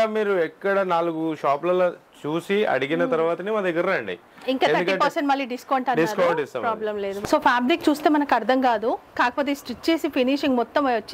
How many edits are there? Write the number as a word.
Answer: one